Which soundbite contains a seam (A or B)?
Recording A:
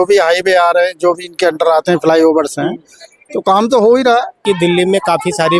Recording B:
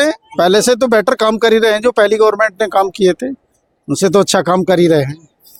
A